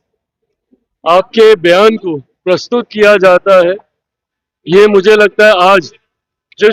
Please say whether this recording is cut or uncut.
uncut